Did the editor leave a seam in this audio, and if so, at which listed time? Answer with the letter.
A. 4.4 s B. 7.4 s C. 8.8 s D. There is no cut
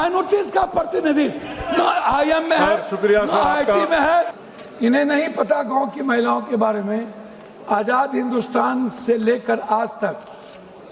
A